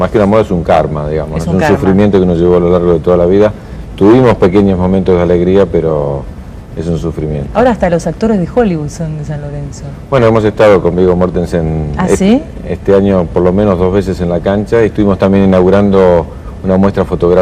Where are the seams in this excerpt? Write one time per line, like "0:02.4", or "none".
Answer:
0:06.2